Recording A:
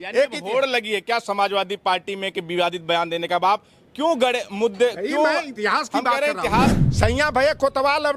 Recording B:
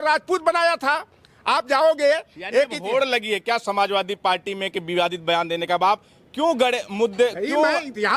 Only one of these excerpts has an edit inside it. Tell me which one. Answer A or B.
A